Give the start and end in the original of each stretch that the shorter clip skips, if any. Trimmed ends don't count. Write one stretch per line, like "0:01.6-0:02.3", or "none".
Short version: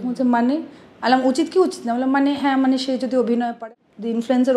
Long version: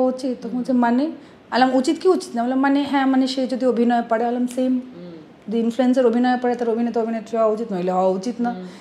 0:04.0-0:05.0